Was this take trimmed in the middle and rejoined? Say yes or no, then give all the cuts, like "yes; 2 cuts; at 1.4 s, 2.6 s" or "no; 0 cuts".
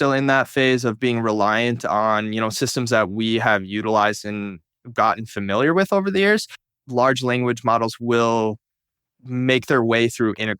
yes; 1 cut; at 6.6 s